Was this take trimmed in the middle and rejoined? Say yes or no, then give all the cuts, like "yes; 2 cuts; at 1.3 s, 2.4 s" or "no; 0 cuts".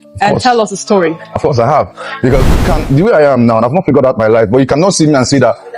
yes; 1 cut; at 2.7 s